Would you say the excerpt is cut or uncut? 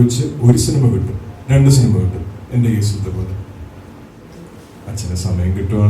cut